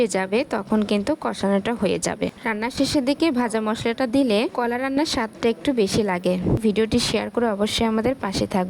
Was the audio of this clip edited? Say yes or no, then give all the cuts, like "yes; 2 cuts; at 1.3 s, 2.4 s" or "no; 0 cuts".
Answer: yes; 2 cuts; at 2.4 s, 6.6 s